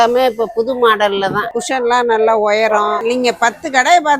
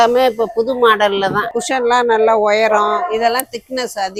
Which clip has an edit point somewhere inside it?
first; 1 cut; at 3.0 s

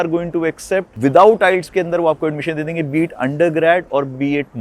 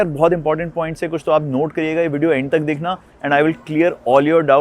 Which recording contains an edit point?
first; 1 cut; at 0.9 s

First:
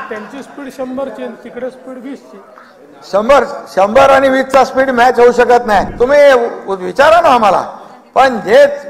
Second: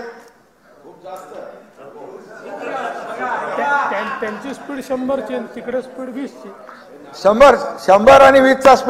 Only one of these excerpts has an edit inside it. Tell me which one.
first; 1 cut; at 5.9 s

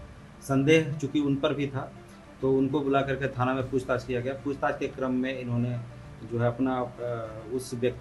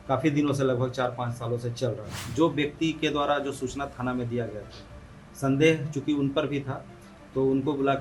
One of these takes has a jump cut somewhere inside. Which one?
second; 1 cut; at 2.2 s

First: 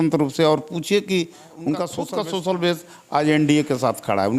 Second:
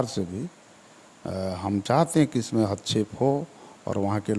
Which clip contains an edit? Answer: first; 1 cut; at 2.0 s

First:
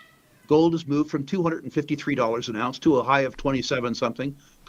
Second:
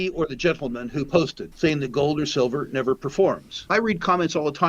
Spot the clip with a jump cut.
second; 2 cuts; at 1.4 s, 3.5 s

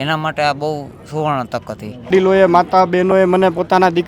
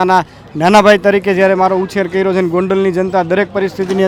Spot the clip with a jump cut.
first; 1 cut; at 2.1 s

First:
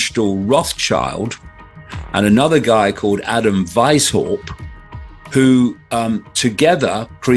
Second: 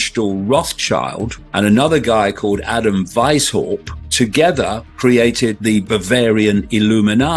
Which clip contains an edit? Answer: second; 3 cuts; at 1.4 s, 4.0 s, 5.6 s

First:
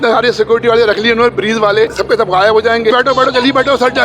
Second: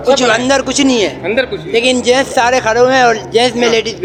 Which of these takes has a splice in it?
first; 2 cuts; at 1.9 s, 2.9 s

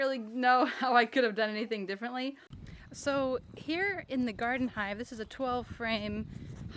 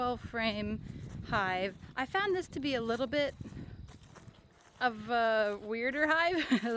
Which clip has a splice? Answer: first; 1 cut; at 2.5 s

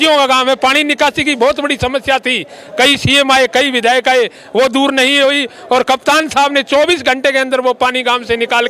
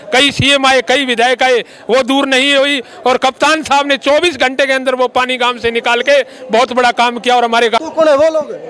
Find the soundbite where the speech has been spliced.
second; 1 cut; at 7.8 s

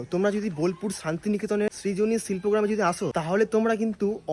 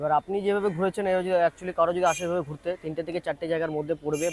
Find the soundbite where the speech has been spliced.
first; 2 cuts; at 1.7 s, 3.1 s

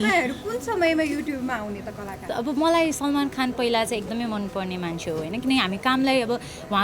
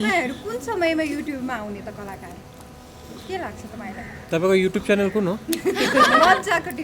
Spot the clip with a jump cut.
first; 1 cut; at 2.2 s

